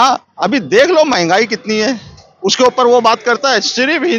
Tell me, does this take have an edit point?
no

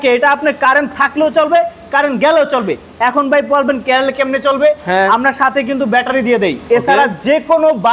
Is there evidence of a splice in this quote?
no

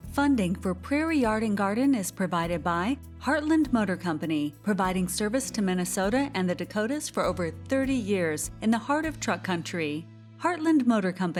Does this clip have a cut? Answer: no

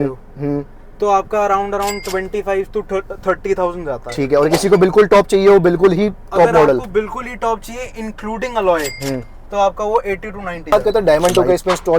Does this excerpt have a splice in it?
yes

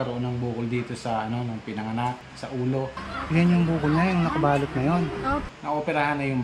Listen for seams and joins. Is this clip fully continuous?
no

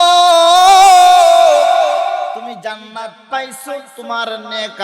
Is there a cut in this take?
yes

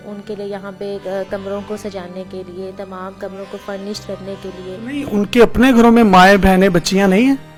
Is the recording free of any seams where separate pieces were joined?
yes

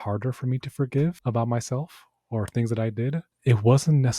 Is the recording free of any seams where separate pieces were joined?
no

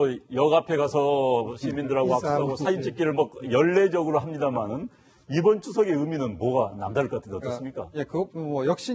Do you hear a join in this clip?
no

